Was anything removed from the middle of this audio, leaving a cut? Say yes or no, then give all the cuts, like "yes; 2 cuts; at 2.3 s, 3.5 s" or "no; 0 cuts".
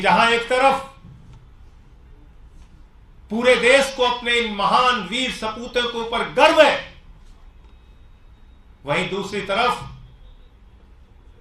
no; 0 cuts